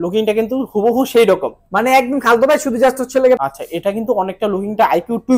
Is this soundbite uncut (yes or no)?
no